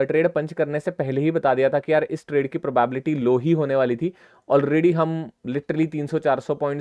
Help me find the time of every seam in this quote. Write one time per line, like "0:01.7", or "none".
none